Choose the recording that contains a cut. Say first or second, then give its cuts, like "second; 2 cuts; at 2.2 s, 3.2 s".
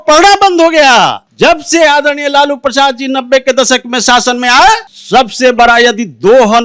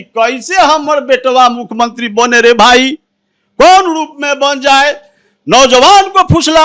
first; 2 cuts; at 1.2 s, 4.9 s